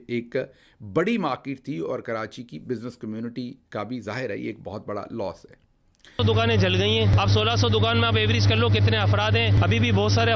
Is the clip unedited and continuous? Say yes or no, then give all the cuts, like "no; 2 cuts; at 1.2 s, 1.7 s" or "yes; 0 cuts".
no; 1 cut; at 6.2 s